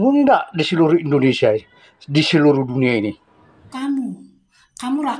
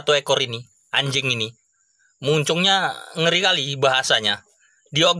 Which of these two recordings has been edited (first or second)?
first